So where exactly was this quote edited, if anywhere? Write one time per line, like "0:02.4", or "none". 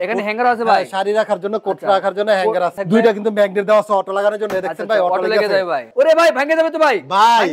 0:02.8
0:05.9